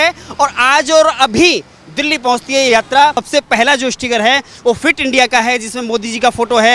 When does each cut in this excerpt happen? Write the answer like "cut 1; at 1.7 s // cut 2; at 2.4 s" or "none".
cut 1; at 3.2 s